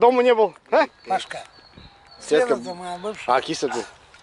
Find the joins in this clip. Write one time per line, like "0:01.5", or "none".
0:01.0